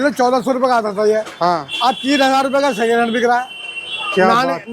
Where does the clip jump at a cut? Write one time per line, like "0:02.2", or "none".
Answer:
none